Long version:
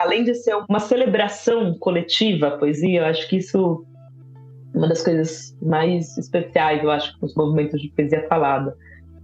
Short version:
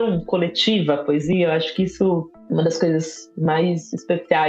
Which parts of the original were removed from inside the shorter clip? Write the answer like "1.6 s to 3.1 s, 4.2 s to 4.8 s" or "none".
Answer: 3.9 s to 4.6 s